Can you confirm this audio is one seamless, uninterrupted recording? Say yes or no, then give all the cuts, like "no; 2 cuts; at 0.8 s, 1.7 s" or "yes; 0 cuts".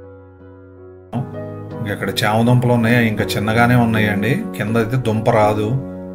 no; 1 cut; at 1.1 s